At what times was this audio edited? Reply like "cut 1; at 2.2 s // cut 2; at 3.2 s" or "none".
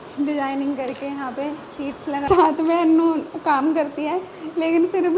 cut 1; at 2.2 s